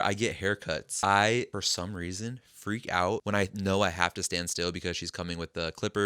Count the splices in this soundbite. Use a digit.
3